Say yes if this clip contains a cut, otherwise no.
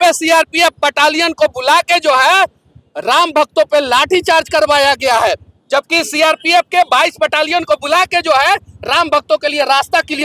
no